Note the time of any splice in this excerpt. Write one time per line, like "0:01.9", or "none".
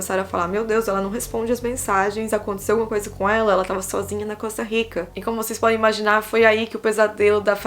0:05.1